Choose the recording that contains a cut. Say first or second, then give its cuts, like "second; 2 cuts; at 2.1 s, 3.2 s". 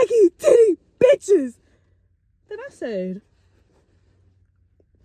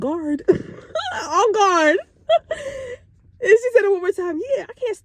second; 1 cut; at 2.2 s